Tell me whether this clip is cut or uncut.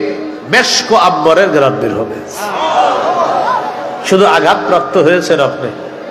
uncut